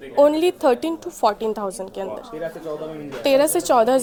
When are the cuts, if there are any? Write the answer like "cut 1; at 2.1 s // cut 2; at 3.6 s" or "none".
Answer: none